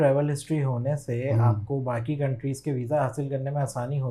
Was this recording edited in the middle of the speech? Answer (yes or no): no